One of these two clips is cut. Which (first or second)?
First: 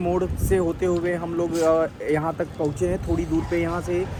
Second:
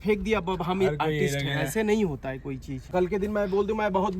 second